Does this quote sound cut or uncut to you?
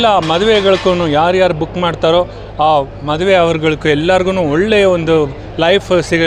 uncut